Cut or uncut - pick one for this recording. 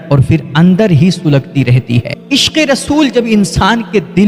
cut